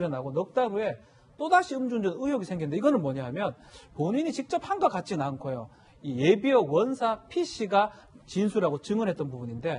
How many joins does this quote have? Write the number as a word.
one